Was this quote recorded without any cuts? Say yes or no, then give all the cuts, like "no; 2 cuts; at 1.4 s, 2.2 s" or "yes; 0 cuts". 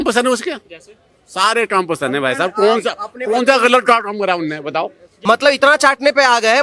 no; 1 cut; at 5.1 s